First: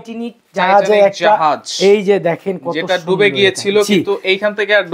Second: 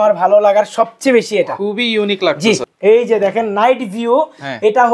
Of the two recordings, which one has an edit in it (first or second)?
second